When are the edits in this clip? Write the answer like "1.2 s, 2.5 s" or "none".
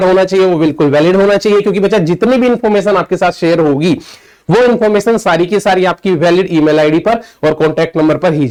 none